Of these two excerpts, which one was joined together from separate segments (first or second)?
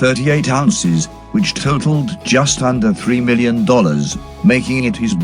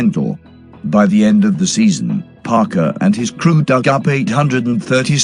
first